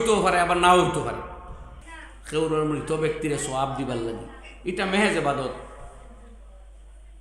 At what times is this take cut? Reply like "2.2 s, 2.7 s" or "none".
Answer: 1.8 s

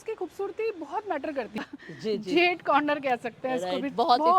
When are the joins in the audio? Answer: 1.6 s

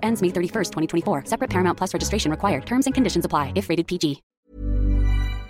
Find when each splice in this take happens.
4.3 s

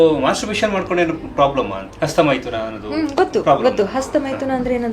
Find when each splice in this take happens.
1.8 s

